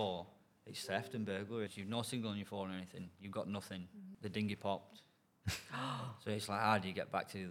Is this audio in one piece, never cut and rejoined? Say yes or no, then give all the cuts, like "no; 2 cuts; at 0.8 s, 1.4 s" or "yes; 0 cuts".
no; 2 cuts; at 1.8 s, 4.1 s